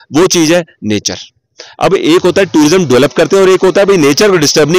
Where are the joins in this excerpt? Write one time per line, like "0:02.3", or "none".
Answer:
none